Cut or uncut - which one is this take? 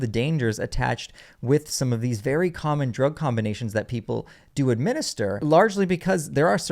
cut